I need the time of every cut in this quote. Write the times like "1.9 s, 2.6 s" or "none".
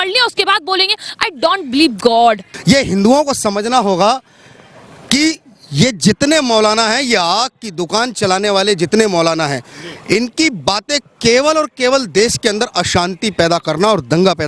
2.5 s